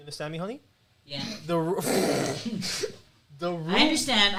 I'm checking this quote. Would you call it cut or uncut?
uncut